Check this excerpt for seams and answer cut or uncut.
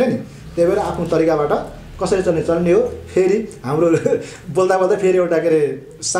uncut